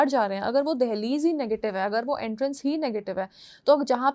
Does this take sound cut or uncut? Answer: uncut